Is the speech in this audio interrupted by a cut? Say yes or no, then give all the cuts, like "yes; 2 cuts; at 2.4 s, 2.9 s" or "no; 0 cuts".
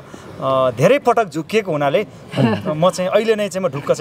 no; 0 cuts